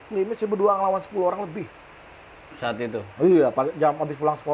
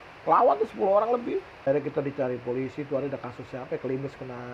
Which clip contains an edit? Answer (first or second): second